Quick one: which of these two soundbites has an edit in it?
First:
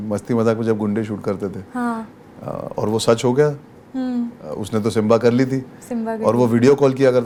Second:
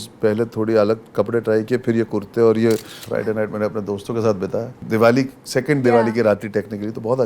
second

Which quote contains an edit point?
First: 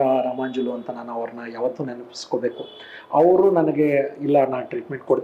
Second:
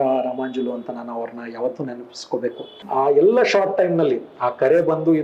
second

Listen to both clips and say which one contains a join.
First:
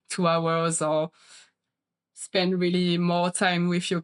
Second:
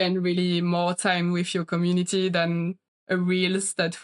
second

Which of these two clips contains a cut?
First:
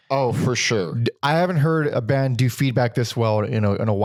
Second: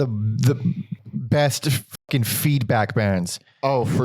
second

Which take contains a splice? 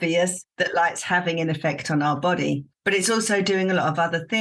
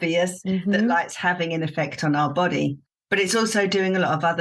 first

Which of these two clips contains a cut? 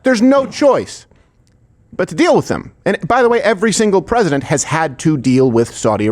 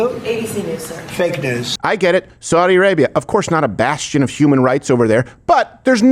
second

